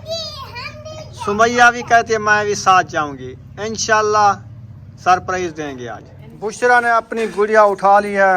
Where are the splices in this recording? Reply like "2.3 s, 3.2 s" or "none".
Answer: 6.6 s